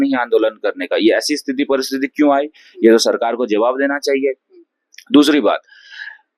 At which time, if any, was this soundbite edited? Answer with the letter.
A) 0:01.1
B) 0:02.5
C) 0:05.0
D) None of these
D